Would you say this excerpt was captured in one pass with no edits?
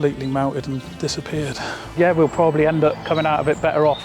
no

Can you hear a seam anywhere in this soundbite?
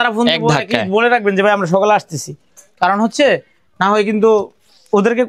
no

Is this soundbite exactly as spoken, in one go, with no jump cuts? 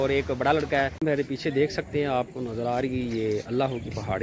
no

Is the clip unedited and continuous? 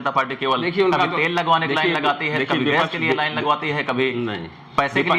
yes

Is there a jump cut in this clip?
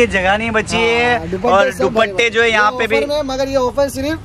no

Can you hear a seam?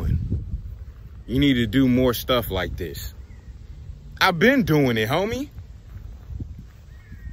no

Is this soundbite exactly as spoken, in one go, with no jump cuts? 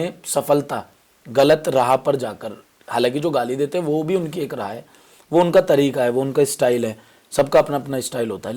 yes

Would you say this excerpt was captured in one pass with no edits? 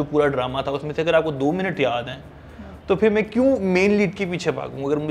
yes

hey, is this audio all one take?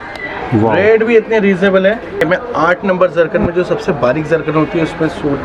no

